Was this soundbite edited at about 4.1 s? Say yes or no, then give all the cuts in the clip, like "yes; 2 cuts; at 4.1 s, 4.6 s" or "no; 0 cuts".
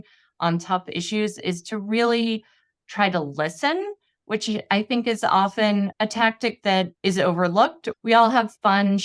no; 3 cuts; at 5.9 s, 6.9 s, 7.8 s